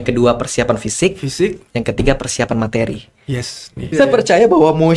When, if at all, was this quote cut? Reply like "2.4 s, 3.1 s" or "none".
3.8 s